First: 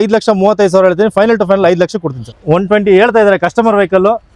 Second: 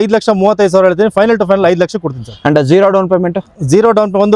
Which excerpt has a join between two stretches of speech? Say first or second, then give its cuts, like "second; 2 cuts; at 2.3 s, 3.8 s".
first; 1 cut; at 2.3 s